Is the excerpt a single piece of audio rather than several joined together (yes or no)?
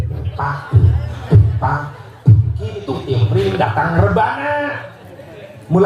no